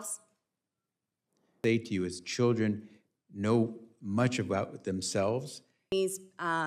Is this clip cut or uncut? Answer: cut